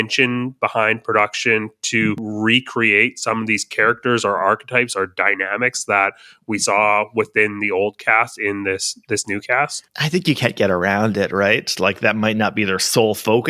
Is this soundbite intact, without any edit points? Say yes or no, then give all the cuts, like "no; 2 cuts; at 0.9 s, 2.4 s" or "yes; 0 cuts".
no; 1 cut; at 2.3 s